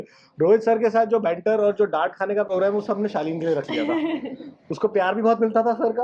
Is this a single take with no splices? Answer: yes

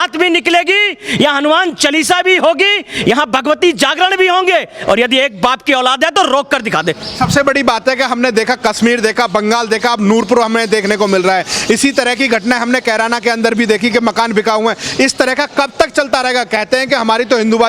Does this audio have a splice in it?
no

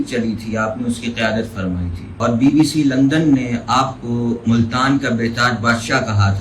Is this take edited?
yes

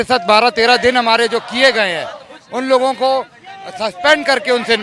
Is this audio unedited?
yes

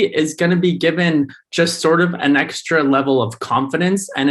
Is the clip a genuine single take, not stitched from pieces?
yes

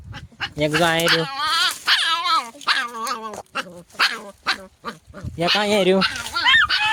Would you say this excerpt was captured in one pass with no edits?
yes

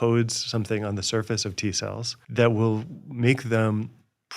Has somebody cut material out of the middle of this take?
yes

